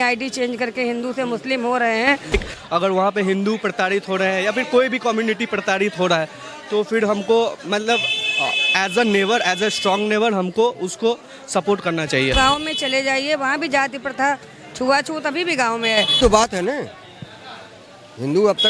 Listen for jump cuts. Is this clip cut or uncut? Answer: cut